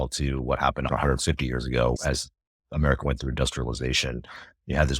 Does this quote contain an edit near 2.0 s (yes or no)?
yes